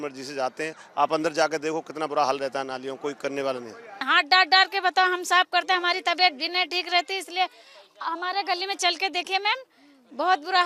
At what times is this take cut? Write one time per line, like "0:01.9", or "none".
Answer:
0:04.0